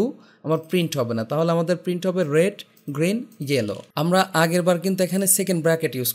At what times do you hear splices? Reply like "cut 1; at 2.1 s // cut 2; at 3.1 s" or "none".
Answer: cut 1; at 3.8 s

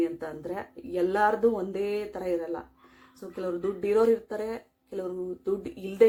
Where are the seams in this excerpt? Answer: none

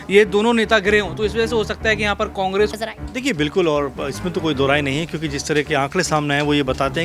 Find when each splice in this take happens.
cut 1; at 2.7 s

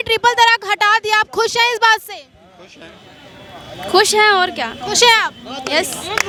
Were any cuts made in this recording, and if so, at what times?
none

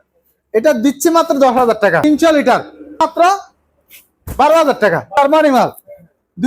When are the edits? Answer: cut 1; at 2.0 s // cut 2; at 3.0 s // cut 3; at 5.2 s

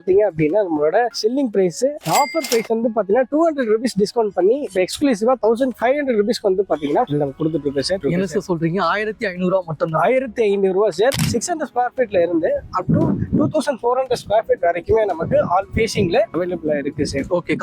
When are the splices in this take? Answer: cut 1; at 8.0 s // cut 2; at 11.2 s

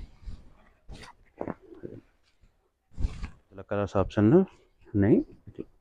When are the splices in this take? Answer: cut 1; at 3.8 s

